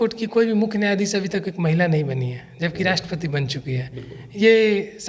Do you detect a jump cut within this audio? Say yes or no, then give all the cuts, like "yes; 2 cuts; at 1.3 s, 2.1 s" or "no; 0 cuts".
no; 0 cuts